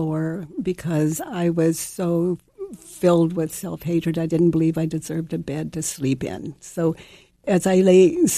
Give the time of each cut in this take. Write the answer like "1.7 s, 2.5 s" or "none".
7.4 s